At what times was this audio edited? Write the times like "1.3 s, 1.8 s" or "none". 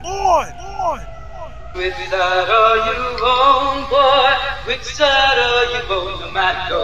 1.1 s